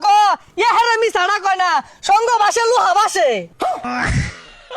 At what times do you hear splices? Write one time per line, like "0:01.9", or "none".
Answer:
0:03.9

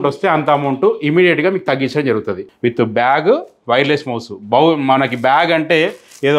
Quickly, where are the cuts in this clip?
0:02.5

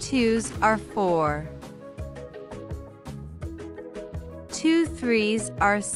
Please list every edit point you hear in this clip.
none

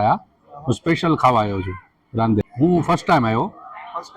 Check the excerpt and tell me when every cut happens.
0:02.5

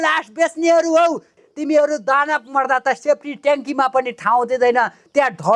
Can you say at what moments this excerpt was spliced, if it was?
0:01.4

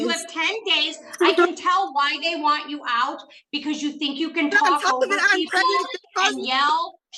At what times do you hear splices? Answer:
none

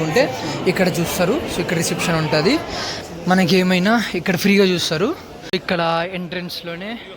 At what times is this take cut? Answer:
0:02.9
0:05.6

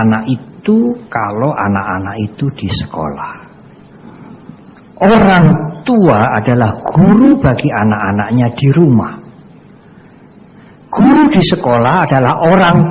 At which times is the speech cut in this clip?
0:04.6

